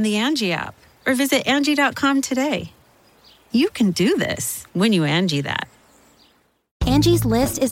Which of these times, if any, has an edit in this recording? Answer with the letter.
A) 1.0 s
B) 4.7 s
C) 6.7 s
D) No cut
C